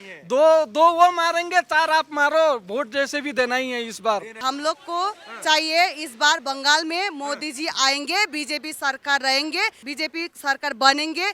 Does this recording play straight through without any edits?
no; 2 cuts; at 4.4 s, 9.8 s

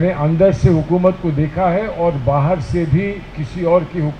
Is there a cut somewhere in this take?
no; 0 cuts

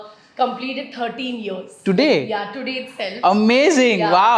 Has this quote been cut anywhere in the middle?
no; 0 cuts

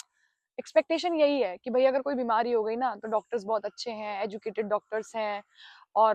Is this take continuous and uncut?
yes; 0 cuts

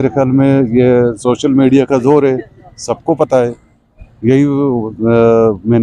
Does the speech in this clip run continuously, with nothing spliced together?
yes; 0 cuts

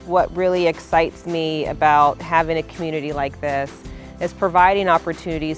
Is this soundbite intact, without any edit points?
yes; 0 cuts

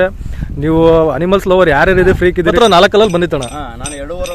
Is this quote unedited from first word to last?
no; 1 cut; at 2.5 s

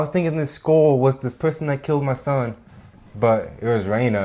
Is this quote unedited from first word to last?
yes; 0 cuts

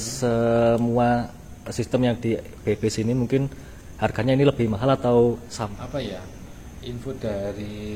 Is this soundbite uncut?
no; 1 cut; at 5.7 s

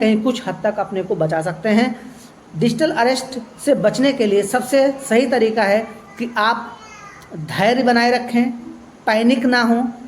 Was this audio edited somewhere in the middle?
no; 0 cuts

